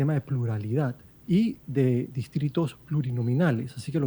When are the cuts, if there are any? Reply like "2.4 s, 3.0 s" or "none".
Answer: 1.1 s